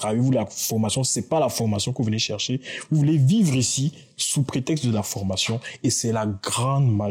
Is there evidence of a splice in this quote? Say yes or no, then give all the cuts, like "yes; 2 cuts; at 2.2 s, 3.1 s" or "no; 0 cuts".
no; 0 cuts